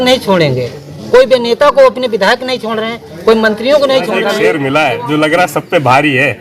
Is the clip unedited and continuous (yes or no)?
no